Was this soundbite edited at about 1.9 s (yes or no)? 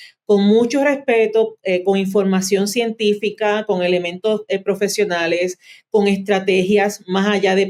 no